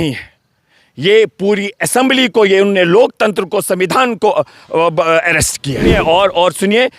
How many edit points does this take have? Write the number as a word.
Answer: one